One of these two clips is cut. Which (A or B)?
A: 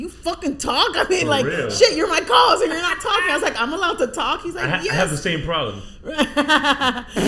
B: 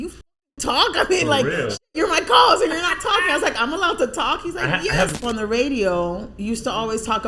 B